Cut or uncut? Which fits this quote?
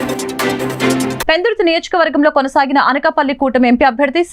cut